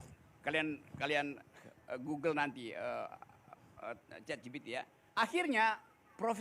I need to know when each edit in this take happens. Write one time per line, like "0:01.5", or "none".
0:05.0